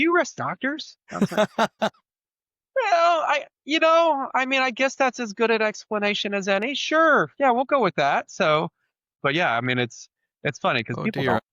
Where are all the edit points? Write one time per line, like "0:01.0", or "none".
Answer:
0:09.2